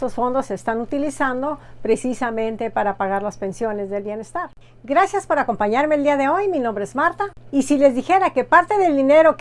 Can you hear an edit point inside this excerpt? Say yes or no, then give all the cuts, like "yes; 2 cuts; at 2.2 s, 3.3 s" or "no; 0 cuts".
yes; 1 cut; at 4.5 s